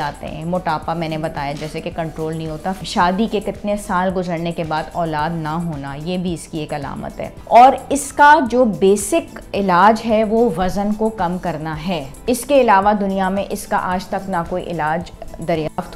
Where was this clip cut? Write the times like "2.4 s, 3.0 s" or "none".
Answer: 2.8 s, 7.4 s, 12.1 s